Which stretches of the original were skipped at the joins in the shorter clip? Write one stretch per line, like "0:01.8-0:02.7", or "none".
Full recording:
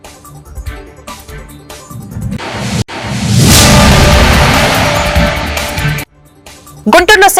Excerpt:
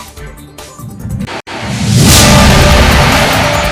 0:02.5-0:02.8

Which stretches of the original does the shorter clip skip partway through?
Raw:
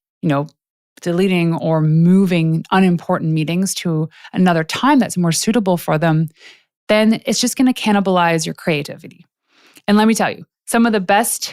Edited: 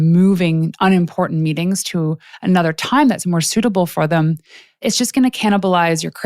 0:06.7-0:07.2

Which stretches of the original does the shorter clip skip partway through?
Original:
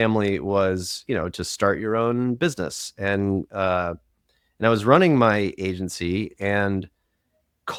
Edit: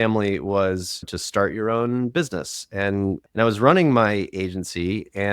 0:01.0-0:01.3
0:03.5-0:04.5

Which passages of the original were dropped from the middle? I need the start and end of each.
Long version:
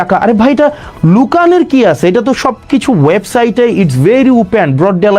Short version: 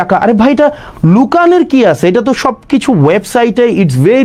none

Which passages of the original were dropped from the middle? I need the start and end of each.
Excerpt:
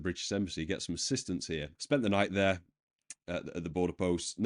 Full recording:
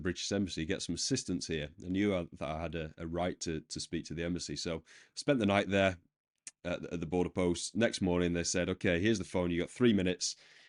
0:01.7-0:05.1

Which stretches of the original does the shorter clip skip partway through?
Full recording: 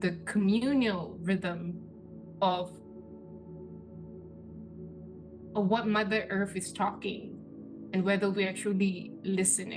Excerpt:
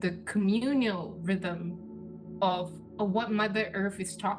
0:02.8-0:05.4

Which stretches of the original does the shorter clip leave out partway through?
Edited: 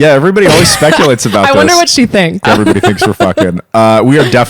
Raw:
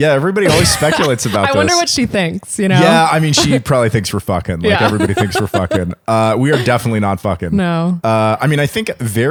0:02.5-0:04.8

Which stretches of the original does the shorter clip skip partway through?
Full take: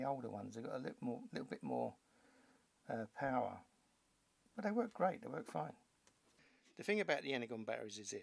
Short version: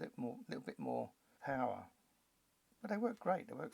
0:02.2-0:03.1

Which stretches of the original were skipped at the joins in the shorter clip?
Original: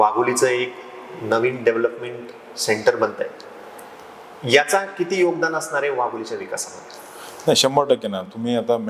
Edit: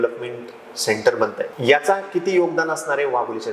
0:03.3-0:04.4

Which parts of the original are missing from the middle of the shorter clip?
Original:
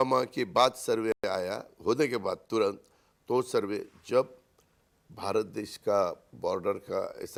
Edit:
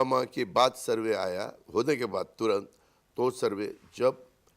0:01.2-0:01.3

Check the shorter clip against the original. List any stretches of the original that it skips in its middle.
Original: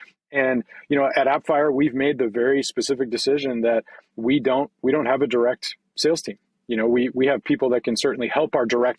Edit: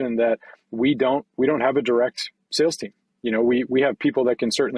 none

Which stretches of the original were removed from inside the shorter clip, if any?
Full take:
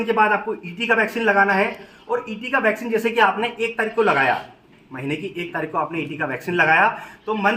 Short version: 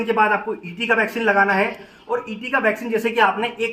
none

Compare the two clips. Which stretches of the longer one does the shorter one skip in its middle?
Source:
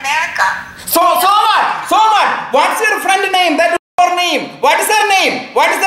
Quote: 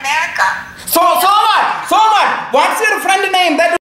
none

